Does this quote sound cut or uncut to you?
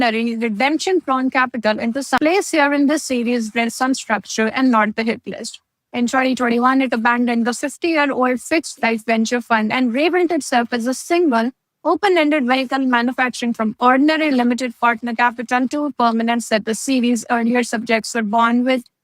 cut